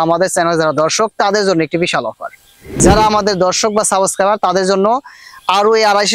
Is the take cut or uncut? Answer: cut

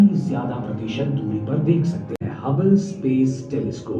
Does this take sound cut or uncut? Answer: cut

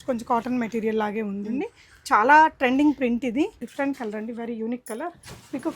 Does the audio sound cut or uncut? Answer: cut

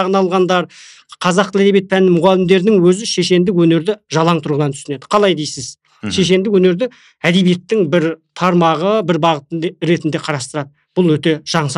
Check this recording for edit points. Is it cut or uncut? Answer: uncut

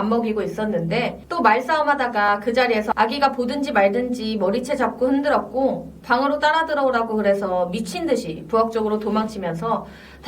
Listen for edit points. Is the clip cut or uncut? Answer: cut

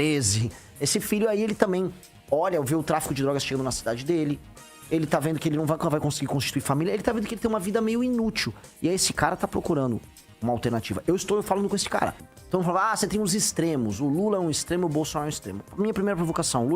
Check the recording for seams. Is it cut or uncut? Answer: cut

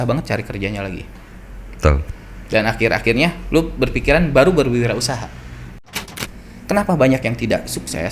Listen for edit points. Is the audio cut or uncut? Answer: cut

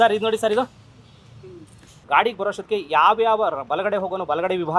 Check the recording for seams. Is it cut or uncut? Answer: cut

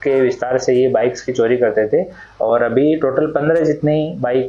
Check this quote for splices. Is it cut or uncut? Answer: uncut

